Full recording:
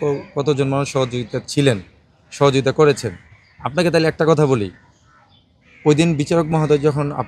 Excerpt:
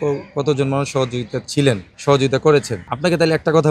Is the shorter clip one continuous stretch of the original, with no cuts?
no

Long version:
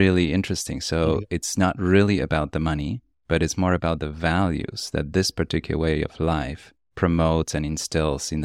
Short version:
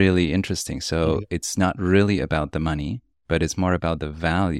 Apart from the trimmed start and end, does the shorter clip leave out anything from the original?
no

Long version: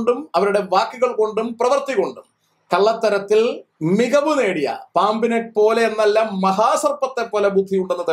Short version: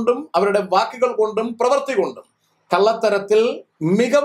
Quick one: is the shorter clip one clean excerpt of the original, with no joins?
yes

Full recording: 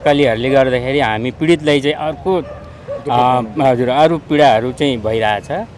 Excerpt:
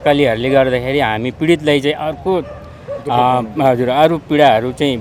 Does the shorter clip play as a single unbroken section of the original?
yes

